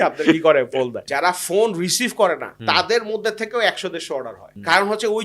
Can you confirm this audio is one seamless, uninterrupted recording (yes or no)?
no